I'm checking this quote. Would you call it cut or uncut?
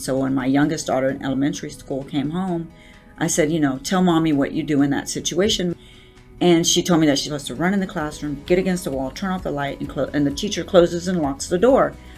cut